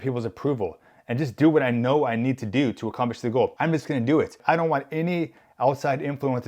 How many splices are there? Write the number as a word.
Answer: two